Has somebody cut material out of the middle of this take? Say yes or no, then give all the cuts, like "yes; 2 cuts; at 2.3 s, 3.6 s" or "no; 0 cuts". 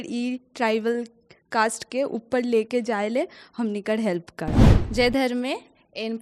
yes; 1 cut; at 4.7 s